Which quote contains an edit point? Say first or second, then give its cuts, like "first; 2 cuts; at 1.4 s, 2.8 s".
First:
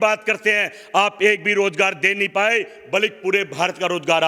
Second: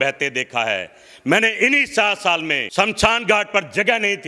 second; 1 cut; at 2.6 s